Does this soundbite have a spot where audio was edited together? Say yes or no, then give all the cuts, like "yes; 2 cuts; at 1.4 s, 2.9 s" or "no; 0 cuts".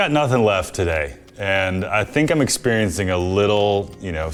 no; 0 cuts